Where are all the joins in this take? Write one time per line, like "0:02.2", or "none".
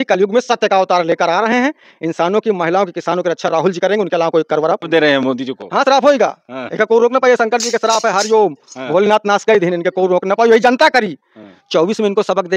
0:04.9